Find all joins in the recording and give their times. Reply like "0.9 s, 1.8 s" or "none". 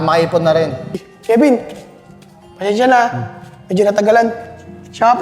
1.1 s